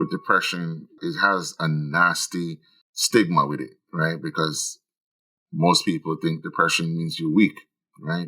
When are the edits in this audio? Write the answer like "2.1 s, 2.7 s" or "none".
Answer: 1.0 s